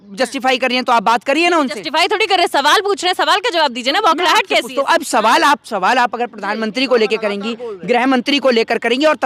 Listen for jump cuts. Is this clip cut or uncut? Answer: uncut